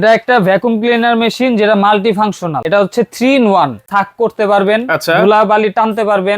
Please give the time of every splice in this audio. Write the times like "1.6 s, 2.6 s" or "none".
2.6 s, 3.8 s